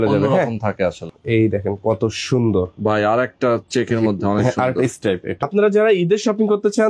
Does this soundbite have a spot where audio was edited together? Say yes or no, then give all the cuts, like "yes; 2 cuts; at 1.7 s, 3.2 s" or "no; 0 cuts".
yes; 2 cuts; at 1.1 s, 5.5 s